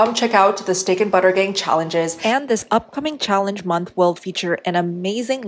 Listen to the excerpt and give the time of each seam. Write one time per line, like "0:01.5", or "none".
0:02.1

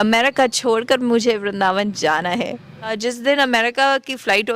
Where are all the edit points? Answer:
0:02.9

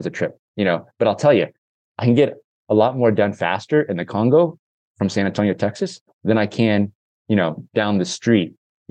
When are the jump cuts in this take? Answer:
none

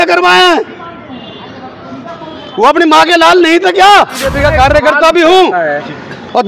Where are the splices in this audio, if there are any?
0:04.3

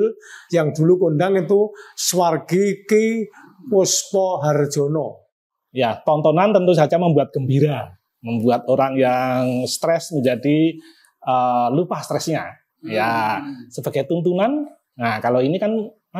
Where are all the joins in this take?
0:05.3

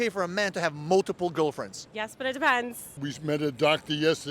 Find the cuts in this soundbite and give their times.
0:02.9

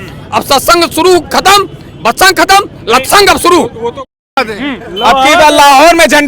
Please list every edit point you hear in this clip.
0:04.4

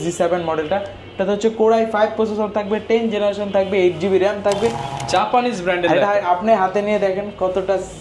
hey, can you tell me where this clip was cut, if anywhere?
0:04.9

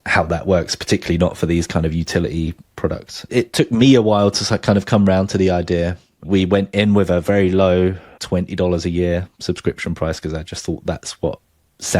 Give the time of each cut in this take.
0:02.9
0:06.2
0:08.1

